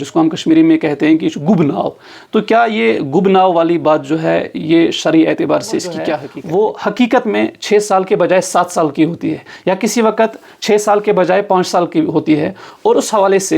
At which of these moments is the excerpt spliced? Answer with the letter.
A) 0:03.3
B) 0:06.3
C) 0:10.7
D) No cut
B